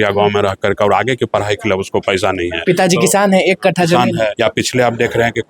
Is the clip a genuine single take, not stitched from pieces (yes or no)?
no